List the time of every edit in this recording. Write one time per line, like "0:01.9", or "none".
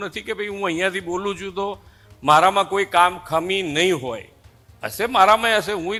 none